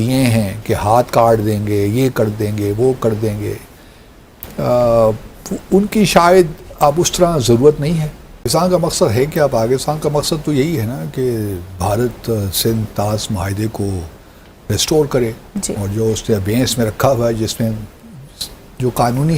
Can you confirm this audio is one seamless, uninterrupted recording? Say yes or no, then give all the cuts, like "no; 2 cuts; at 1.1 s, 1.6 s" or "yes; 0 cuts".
yes; 0 cuts